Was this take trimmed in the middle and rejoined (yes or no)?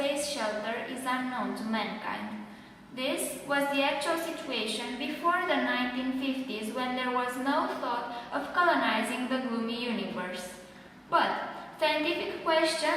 yes